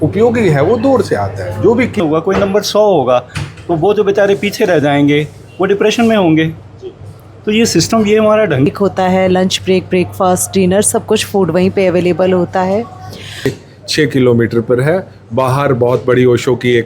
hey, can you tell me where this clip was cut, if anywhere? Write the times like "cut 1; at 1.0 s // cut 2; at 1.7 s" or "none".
cut 1; at 2.0 s // cut 2; at 8.7 s // cut 3; at 13.5 s